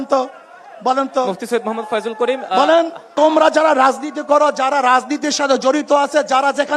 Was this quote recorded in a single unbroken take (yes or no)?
no